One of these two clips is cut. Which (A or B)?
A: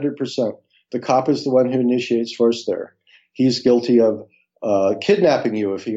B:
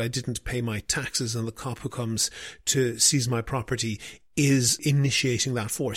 B